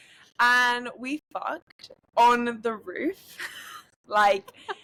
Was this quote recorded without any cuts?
yes; 0 cuts

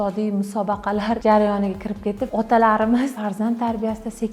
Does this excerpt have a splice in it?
yes; 3 cuts; at 1.2 s, 2.2 s, 3.2 s

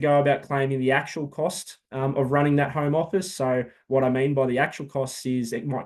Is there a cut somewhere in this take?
no; 0 cuts

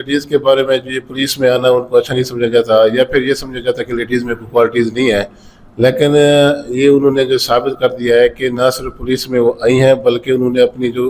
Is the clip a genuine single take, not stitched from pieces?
yes; 0 cuts

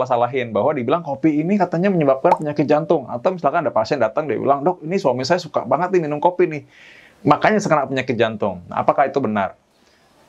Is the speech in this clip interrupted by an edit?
no; 0 cuts

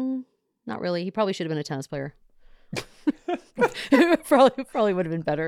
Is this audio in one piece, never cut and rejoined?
yes; 0 cuts

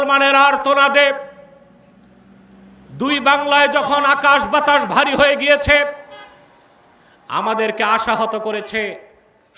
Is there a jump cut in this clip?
no; 0 cuts

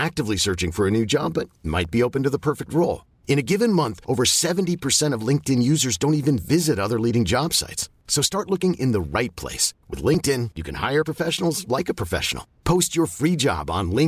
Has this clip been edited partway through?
no; 0 cuts

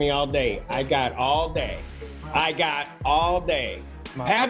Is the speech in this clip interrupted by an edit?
no; 0 cuts

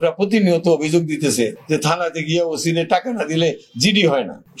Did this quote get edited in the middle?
no; 0 cuts

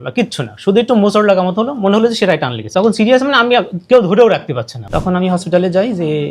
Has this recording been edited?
yes; 2 cuts; at 2.6 s, 4.8 s

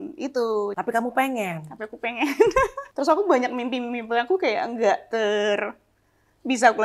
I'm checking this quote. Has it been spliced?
yes; 2 cuts; at 0.8 s, 2.8 s

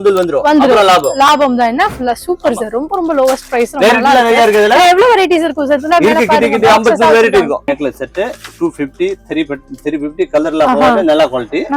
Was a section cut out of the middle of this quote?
no; 0 cuts

